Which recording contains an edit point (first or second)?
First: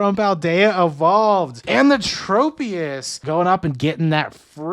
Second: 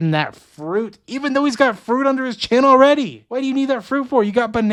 first